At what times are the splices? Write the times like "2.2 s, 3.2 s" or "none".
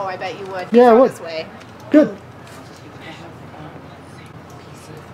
none